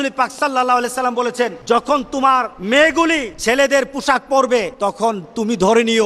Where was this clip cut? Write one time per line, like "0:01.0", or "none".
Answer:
0:01.6
0:02.5
0:03.3
0:04.7

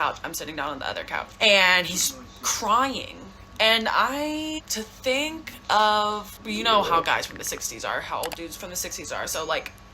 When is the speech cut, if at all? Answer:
0:01.3
0:04.7
0:06.3

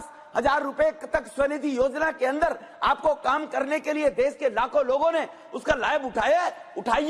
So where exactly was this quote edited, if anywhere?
none

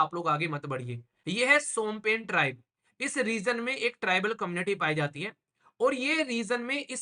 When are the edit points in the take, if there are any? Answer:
0:01.1

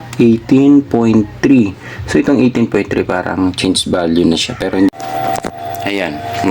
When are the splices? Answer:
0:04.9

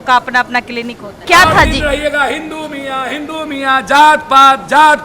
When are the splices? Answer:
0:01.2

